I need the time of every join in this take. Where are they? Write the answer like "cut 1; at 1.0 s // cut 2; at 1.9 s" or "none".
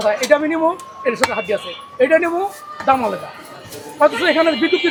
none